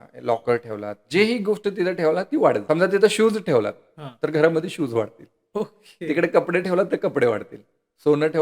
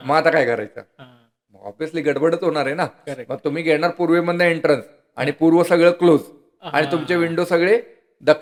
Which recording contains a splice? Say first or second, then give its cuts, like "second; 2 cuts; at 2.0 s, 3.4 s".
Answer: first; 1 cut; at 2.6 s